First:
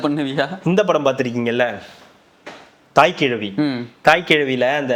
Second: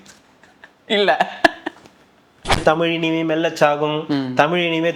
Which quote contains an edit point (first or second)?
second